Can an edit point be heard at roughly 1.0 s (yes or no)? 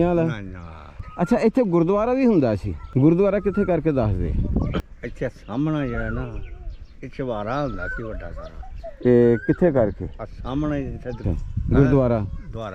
yes